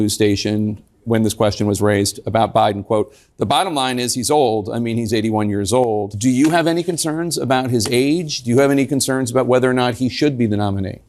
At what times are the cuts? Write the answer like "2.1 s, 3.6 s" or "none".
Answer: 6.1 s